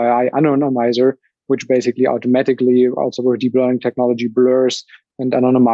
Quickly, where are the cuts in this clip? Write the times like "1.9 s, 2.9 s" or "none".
none